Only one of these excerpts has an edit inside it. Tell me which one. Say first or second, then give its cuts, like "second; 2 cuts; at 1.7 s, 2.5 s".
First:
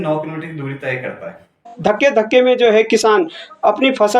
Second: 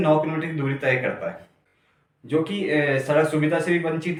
first; 1 cut; at 1.7 s